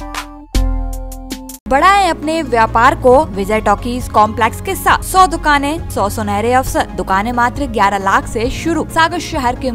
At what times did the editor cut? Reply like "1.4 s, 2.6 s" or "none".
1.7 s, 3.4 s, 5.0 s, 5.8 s, 7.0 s, 8.9 s